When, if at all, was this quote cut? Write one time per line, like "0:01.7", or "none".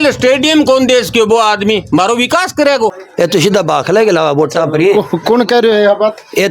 0:03.0